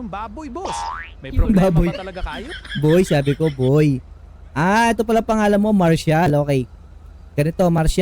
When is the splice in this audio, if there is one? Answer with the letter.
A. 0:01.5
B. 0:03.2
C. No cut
C